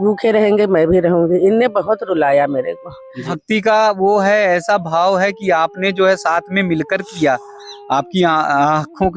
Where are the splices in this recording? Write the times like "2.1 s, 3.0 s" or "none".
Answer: 3.2 s